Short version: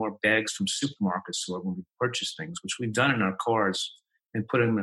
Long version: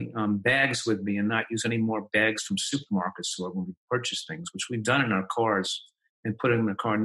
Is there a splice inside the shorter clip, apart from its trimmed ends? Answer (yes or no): no